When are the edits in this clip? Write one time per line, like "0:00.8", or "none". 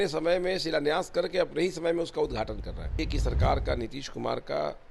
0:03.0

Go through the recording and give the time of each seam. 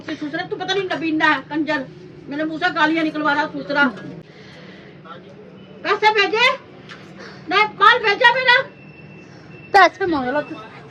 0:04.2

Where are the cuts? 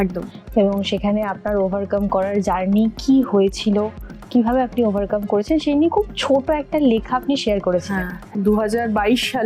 0:08.2

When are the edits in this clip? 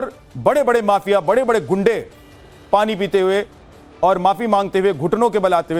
none

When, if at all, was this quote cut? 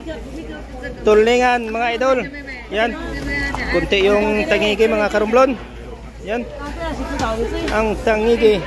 0:03.1

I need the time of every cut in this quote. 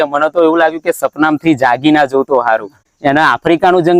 0:02.9

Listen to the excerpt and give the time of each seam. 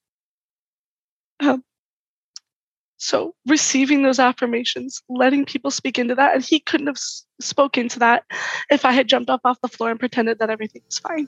0:09.7

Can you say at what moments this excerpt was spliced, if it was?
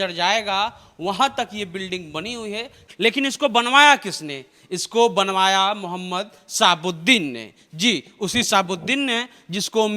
0:02.8

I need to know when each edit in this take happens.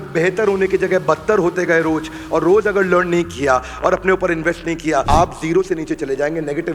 0:05.0

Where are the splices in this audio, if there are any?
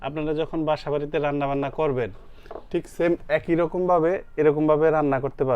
none

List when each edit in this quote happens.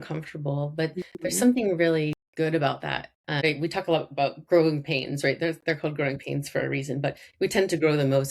0:02.2
0:03.4

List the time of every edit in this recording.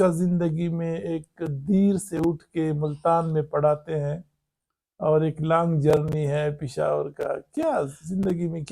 none

